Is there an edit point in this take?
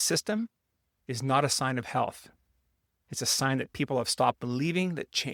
no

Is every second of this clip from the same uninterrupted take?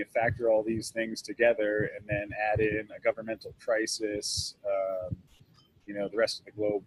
yes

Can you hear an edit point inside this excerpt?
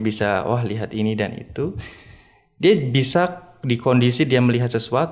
no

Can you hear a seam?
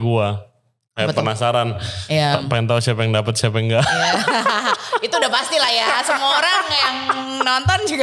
no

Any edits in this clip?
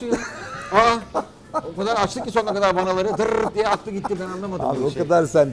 no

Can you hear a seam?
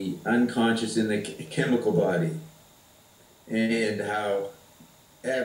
no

